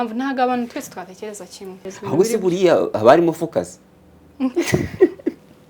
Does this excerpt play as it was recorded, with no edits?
no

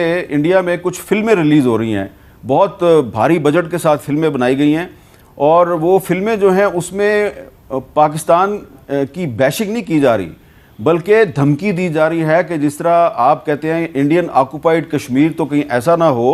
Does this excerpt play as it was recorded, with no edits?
yes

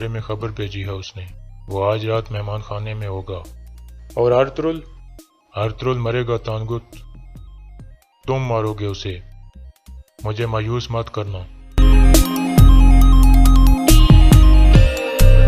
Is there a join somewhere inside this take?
yes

